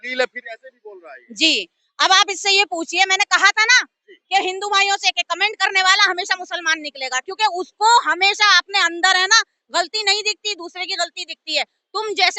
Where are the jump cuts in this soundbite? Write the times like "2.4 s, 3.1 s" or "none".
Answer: none